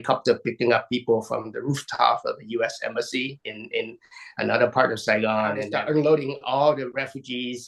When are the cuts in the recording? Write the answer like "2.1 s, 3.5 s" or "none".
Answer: 5.7 s